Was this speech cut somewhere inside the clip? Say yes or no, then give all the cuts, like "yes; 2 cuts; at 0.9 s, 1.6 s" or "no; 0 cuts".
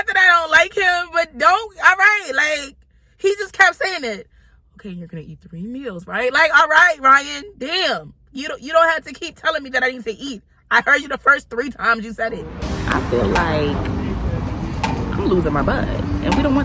yes; 1 cut; at 12.7 s